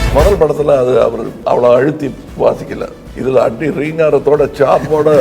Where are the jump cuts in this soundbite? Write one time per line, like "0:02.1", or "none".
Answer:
0:01.3
0:02.2
0:03.1